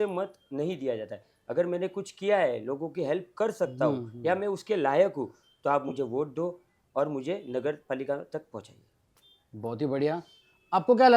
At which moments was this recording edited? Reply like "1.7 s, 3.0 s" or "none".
none